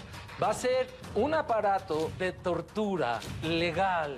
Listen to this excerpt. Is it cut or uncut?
cut